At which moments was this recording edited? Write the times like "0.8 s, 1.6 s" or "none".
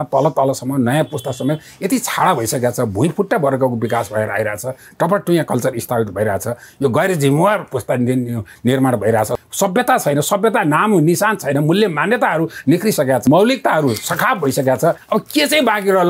9.4 s, 13.3 s, 15.0 s